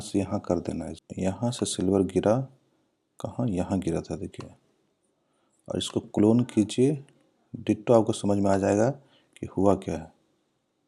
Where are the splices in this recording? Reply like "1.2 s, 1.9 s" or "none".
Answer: 1.0 s